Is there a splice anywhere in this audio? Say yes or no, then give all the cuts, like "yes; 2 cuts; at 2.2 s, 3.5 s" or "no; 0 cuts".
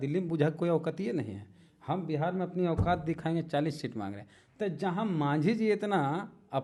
no; 0 cuts